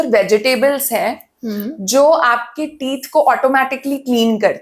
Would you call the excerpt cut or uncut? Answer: uncut